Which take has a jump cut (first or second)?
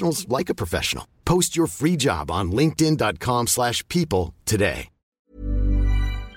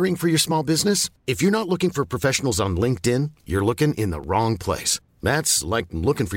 first